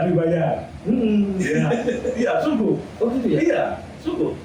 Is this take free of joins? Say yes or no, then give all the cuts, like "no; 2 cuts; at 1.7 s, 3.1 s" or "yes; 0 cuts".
yes; 0 cuts